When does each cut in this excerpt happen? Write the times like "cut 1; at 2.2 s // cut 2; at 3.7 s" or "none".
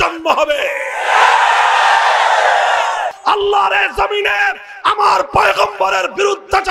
cut 1; at 3.1 s